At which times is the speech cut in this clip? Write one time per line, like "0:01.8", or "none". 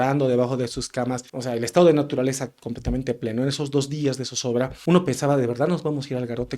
0:01.3
0:04.8